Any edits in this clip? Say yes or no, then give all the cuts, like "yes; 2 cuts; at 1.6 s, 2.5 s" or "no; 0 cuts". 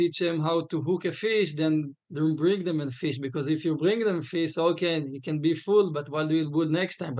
no; 0 cuts